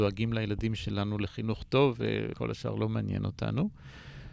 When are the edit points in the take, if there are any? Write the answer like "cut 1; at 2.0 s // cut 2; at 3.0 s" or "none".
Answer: cut 1; at 2.3 s